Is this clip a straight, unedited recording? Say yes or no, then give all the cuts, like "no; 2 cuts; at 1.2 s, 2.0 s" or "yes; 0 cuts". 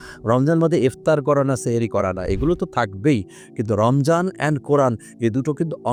yes; 0 cuts